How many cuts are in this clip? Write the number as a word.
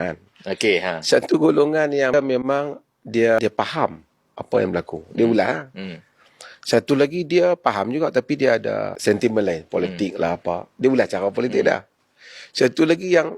three